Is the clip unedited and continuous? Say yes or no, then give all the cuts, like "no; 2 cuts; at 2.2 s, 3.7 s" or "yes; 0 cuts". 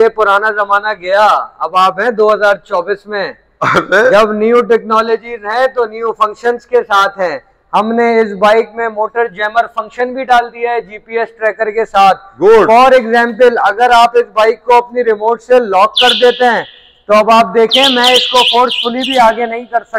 yes; 0 cuts